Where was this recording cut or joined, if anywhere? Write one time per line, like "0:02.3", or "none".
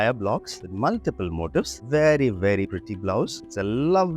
0:01.8